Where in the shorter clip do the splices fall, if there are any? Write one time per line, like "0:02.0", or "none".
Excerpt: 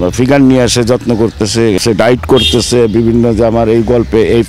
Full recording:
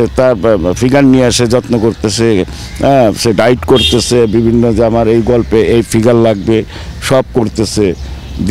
0:01.8